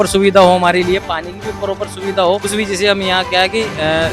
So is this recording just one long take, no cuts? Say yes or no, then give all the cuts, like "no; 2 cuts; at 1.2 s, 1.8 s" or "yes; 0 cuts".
no; 1 cut; at 2.4 s